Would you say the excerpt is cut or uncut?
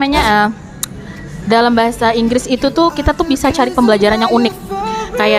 uncut